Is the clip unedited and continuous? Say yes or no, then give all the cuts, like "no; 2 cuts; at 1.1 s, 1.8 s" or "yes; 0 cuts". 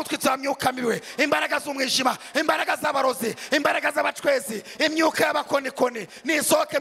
yes; 0 cuts